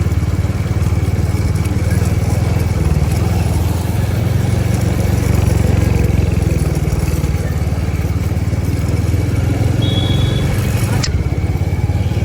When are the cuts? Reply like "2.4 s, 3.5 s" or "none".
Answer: none